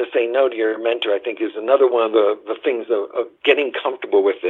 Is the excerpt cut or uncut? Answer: uncut